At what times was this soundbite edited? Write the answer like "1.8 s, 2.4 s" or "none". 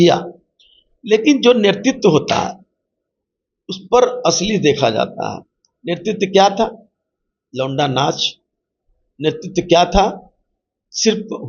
none